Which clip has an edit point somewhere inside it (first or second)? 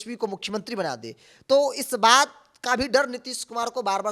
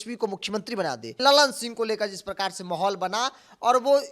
second